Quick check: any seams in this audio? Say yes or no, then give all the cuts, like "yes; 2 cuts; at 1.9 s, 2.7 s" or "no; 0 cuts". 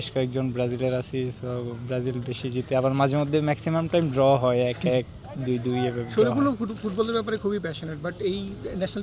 no; 0 cuts